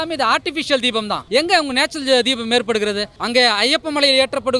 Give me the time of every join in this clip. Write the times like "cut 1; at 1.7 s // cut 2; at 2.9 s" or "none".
cut 1; at 1.2 s // cut 2; at 3.1 s